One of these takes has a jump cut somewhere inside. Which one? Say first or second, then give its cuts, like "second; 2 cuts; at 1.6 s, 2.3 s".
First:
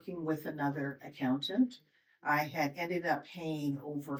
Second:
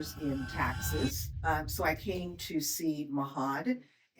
second; 1 cut; at 1.3 s